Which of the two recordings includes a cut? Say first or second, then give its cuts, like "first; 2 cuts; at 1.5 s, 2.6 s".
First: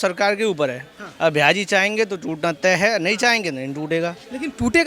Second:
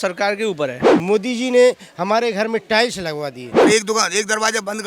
second; 2 cuts; at 0.9 s, 3.5 s